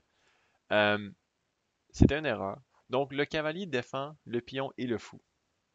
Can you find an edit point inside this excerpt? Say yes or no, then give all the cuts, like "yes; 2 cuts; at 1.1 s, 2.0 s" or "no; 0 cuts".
yes; 1 cut; at 2.7 s